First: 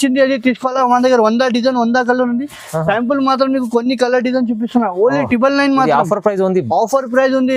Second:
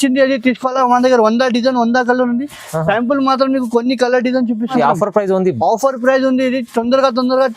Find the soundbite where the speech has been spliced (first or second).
second